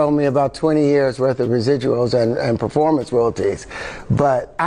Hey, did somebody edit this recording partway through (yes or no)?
no